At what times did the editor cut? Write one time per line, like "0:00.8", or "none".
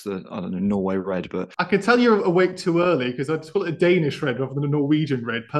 0:01.5